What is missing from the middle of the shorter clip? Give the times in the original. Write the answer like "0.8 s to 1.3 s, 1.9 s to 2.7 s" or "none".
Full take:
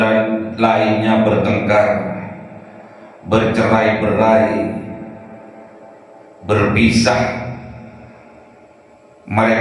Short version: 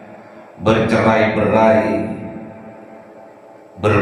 none